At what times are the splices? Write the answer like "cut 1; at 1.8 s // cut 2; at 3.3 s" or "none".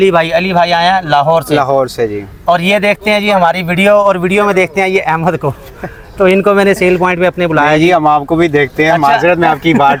none